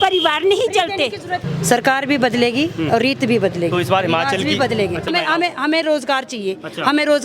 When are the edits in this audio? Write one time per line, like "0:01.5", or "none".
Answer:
0:01.4
0:05.1